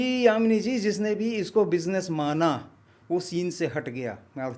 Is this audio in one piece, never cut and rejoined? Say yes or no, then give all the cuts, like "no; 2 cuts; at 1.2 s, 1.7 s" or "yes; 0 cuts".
yes; 0 cuts